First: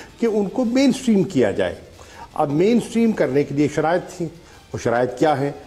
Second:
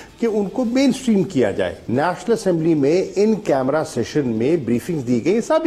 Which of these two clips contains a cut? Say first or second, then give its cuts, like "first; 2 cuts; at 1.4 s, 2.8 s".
second; 1 cut; at 1.8 s